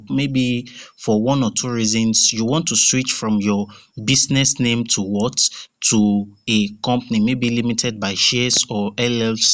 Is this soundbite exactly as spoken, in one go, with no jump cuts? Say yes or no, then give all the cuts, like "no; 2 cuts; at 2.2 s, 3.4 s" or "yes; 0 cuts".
yes; 0 cuts